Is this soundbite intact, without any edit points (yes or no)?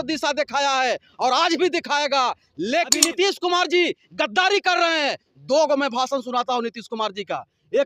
no